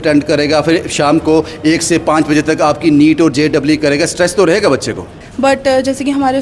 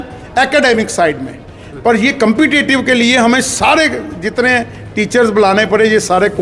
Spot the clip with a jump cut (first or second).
first